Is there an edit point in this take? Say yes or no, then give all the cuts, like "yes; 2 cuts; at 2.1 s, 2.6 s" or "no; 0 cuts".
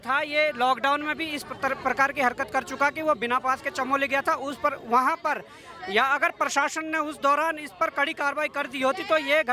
no; 0 cuts